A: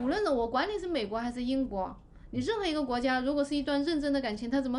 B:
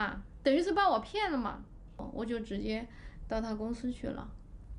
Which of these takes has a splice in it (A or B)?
B